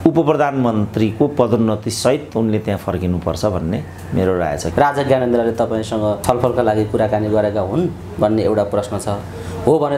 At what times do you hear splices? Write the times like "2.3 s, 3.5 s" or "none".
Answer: 4.7 s, 6.2 s